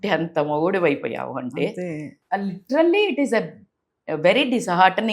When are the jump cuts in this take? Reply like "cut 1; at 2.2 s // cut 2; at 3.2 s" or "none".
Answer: cut 1; at 2.1 s